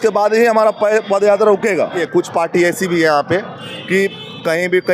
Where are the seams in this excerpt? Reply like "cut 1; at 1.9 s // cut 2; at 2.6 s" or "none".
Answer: cut 1; at 2.0 s